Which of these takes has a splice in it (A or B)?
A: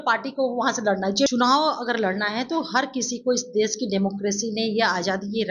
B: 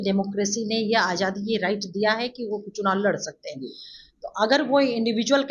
A